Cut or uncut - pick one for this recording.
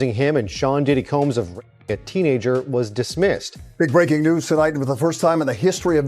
cut